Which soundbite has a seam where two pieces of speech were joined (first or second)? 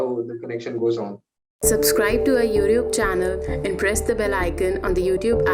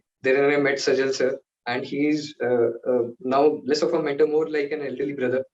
first